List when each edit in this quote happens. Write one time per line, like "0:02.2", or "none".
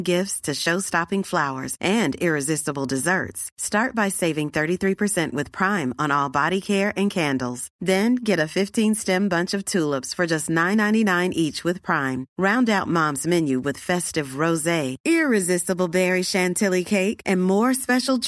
none

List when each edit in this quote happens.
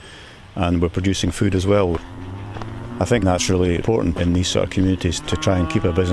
none

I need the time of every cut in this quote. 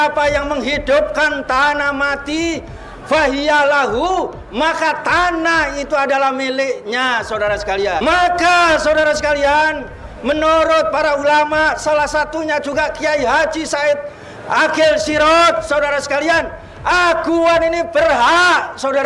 0:08.0

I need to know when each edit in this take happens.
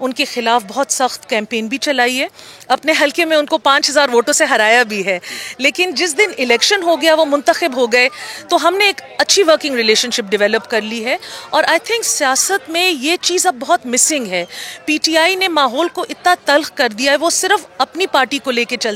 none

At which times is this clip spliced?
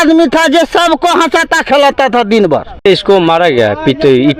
0:02.9

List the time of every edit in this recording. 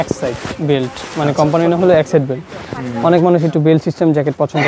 none

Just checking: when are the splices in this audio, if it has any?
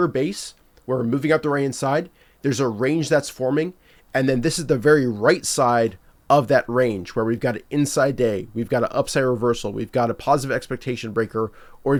none

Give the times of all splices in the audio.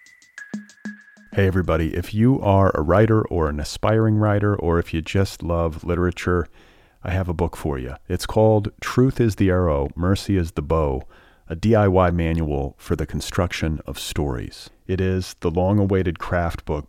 0:00.9

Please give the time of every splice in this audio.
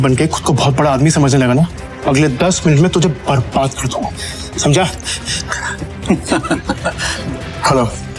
0:01.9
0:07.1

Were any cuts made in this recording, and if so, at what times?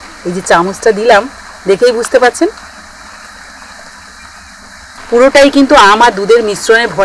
none

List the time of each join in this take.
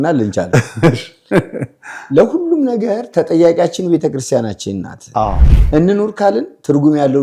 0:05.4

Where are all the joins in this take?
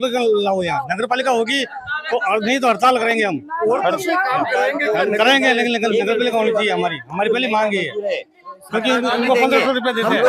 none

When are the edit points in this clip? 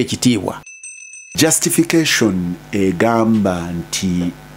0:01.2

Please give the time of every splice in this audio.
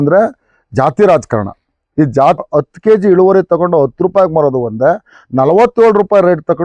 0:02.4

